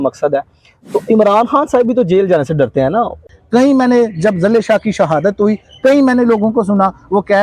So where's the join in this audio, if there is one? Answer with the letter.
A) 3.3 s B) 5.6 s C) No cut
A